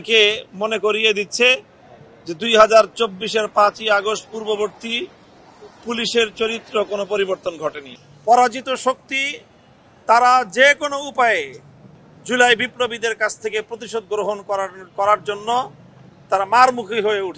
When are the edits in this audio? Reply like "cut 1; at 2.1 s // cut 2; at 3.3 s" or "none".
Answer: cut 1; at 7.9 s